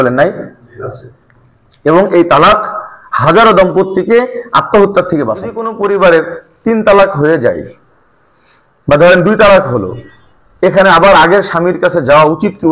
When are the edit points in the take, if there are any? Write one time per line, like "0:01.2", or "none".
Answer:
0:05.7

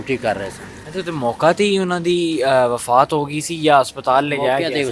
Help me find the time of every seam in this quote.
none

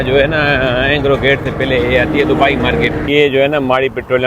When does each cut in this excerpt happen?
0:03.0

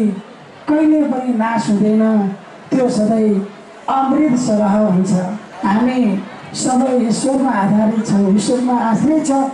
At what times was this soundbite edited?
0:05.5

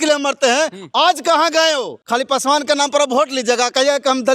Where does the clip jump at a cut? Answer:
0:02.0

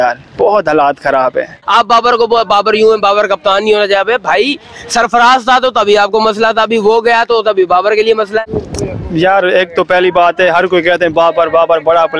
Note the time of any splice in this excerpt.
0:01.5
0:08.5

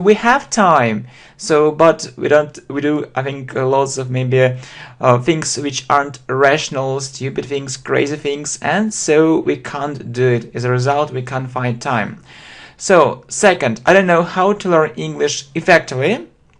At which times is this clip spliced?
0:05.2

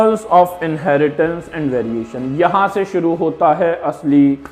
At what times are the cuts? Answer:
none

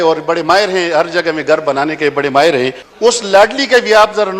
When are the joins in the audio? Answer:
0:02.8

